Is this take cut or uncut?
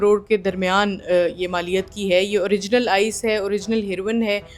uncut